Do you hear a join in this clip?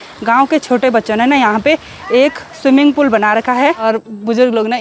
yes; 1 cut; at 3.8 s

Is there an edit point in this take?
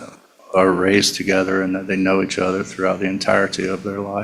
no; 0 cuts

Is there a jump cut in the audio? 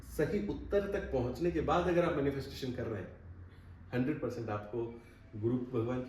no; 0 cuts

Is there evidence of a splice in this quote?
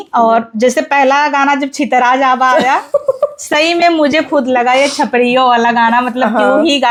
no; 0 cuts

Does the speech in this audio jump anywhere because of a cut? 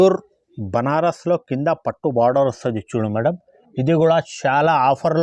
no; 0 cuts

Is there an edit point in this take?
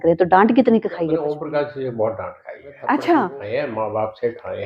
yes; 2 cuts; at 1.2 s, 3.4 s

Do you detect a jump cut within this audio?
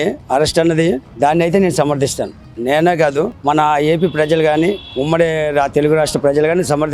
no; 0 cuts

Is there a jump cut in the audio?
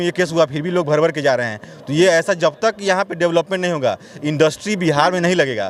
no; 0 cuts

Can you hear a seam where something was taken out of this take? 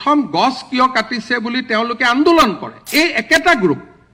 yes; 1 cut; at 2.7 s

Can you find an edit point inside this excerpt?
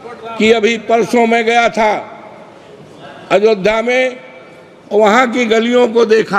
no; 0 cuts

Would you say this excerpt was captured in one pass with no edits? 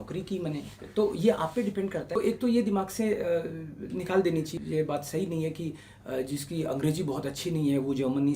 no; 2 cuts; at 2.1 s, 4.5 s

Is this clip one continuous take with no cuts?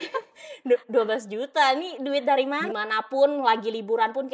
no; 1 cut; at 2.6 s

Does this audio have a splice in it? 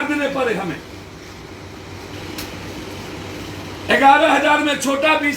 yes; 1 cut; at 2.1 s

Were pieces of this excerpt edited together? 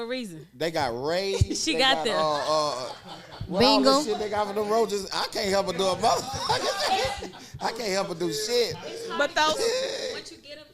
no; 0 cuts

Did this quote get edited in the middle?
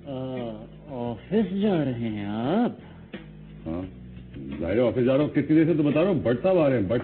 no; 0 cuts

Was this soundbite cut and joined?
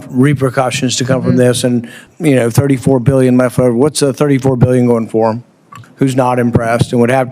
yes; 2 cuts; at 2.0 s, 5.8 s

